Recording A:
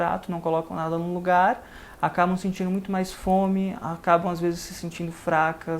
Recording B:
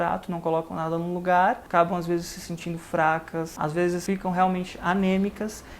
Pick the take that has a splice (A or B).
B